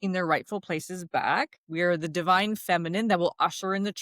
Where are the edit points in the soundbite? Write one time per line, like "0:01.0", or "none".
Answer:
0:01.6